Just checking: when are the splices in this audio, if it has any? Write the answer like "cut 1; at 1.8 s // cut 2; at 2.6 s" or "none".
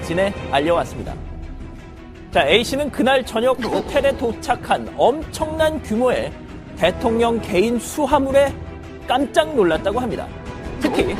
cut 1; at 8.1 s

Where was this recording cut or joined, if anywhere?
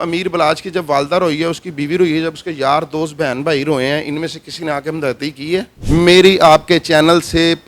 cut 1; at 5.7 s

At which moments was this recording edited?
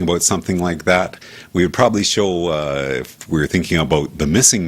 none

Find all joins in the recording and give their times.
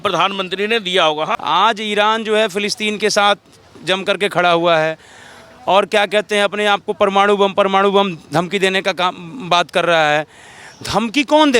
cut 1; at 1.3 s

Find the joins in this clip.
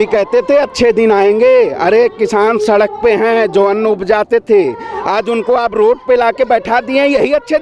none

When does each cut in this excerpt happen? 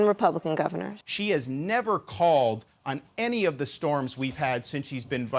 cut 1; at 1.0 s

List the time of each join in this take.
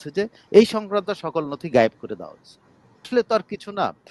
cut 1; at 3.1 s

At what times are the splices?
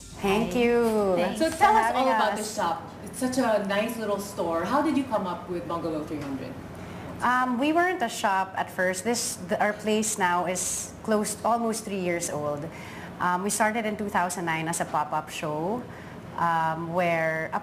cut 1; at 11.7 s

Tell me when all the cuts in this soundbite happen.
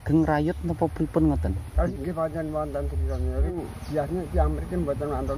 cut 1; at 1.9 s // cut 2; at 3.5 s

